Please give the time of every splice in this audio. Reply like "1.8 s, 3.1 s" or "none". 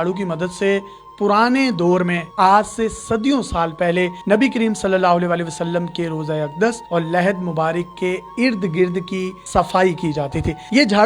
none